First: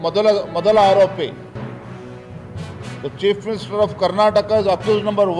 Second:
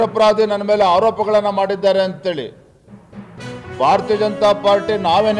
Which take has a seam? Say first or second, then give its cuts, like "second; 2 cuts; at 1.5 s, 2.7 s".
first; 2 cuts; at 1.5 s, 3.0 s